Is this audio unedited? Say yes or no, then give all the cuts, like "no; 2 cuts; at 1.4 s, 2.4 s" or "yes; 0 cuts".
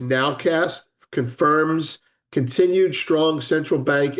yes; 0 cuts